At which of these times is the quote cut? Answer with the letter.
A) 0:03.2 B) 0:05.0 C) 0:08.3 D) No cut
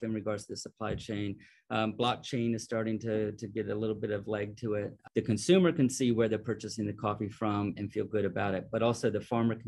B